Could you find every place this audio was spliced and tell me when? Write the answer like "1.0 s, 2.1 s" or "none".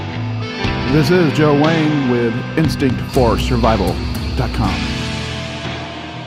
none